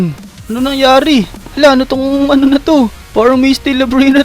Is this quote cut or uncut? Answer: cut